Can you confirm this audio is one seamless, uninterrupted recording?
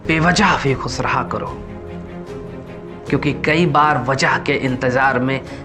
yes; 0 cuts

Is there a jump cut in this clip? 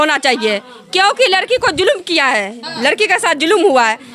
no; 0 cuts

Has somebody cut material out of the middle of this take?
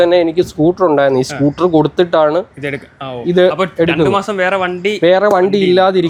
no; 0 cuts

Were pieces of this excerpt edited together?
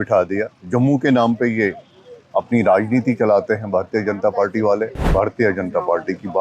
yes; 1 cut; at 5.0 s

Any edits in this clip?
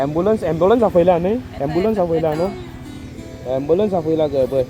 no; 0 cuts

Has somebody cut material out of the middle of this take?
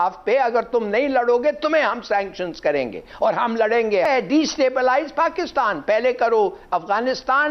yes; 1 cut; at 4.1 s

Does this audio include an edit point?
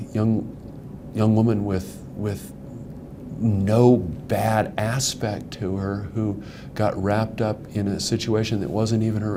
no; 0 cuts

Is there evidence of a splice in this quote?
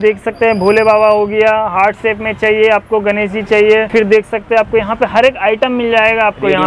no; 0 cuts

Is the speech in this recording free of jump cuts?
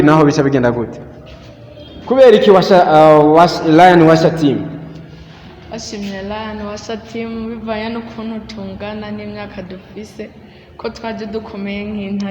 no; 1 cut; at 2.0 s

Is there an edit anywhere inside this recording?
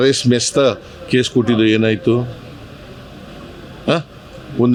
no; 0 cuts

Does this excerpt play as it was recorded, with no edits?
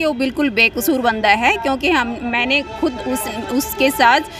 yes; 0 cuts

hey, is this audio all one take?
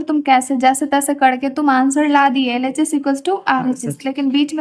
yes; 0 cuts

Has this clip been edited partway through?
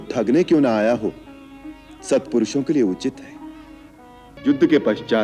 yes; 1 cut; at 4.3 s

